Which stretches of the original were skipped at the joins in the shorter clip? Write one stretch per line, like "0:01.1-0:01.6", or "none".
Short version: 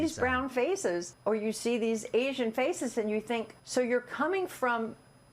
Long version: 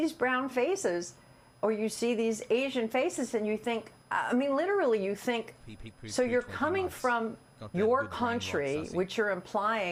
0:01.1-0:01.5
0:03.9-0:06.0